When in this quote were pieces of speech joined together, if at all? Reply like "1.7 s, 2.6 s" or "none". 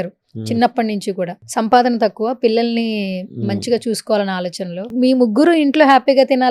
1.4 s, 4.9 s